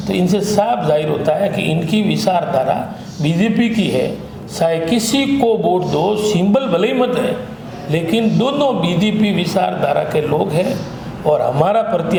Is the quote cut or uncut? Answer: uncut